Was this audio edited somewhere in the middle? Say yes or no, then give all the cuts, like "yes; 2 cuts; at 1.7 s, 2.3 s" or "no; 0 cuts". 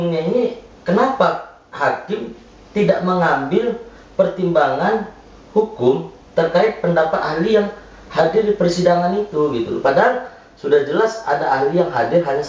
no; 0 cuts